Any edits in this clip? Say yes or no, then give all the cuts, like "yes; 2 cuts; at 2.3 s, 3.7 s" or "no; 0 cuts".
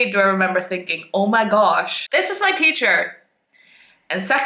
yes; 1 cut; at 2.0 s